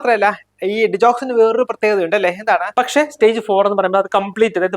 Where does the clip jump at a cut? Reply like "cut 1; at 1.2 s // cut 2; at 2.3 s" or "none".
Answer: cut 1; at 2.7 s